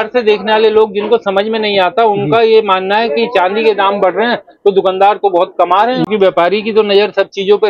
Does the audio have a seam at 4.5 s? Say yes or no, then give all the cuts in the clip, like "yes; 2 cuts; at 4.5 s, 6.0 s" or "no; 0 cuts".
no; 1 cut; at 6.1 s